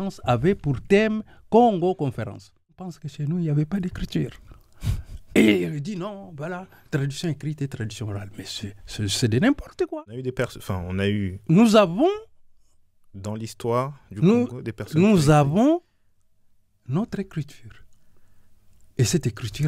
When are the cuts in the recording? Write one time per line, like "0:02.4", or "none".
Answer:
0:03.1
0:09.9